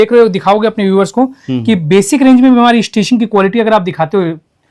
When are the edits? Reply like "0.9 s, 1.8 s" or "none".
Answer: none

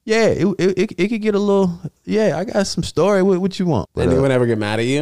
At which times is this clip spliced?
3.9 s

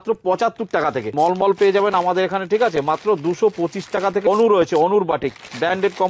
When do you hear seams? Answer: 1.1 s, 4.3 s

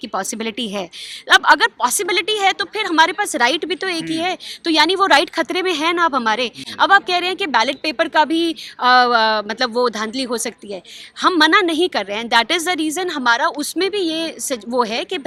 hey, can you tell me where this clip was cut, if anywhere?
none

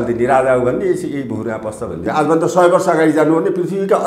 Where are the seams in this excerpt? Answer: 2.0 s

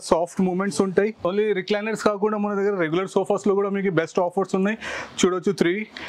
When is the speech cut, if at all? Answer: 1.2 s

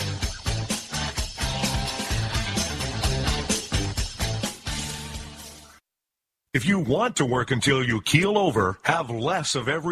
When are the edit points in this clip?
5.9 s

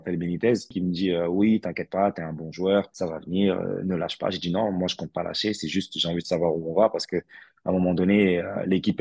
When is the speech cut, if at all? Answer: none

